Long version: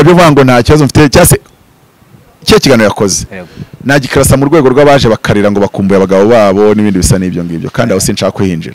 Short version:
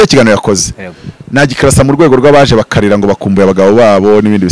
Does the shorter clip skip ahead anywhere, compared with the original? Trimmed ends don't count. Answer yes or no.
no